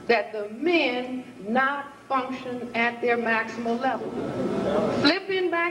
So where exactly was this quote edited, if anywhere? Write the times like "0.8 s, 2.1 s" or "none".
4.1 s